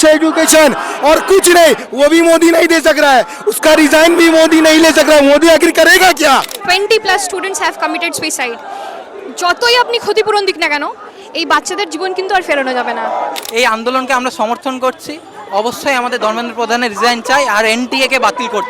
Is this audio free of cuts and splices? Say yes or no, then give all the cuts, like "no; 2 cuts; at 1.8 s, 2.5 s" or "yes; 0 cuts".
no; 2 cuts; at 6.6 s, 13.4 s